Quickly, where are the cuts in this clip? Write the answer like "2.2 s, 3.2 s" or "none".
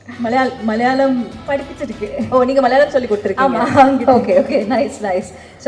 none

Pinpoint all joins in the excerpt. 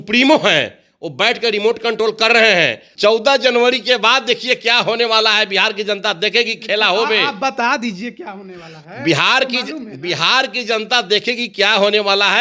2.9 s

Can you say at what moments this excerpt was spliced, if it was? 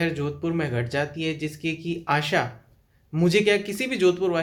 none

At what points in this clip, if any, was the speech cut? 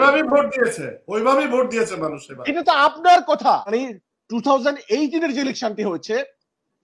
3.7 s

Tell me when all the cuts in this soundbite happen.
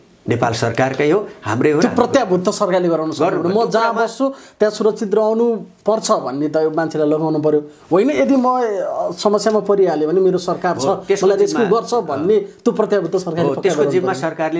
none

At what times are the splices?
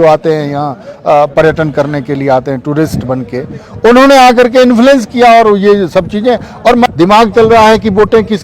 6.9 s

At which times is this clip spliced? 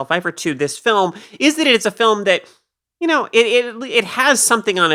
none

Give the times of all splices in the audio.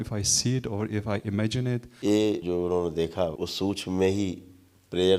1.9 s, 2.4 s, 3.3 s

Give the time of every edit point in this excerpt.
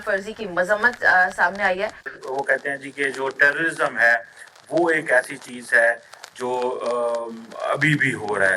2.1 s

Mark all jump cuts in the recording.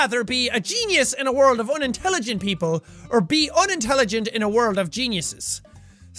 none

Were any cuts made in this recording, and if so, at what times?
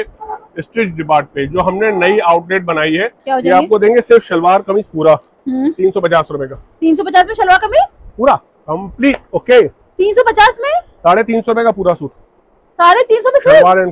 3.1 s

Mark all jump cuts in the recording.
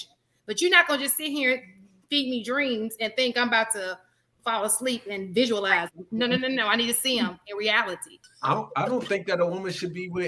8.2 s

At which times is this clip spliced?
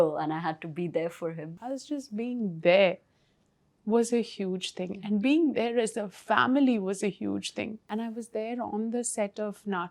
1.7 s, 7.8 s

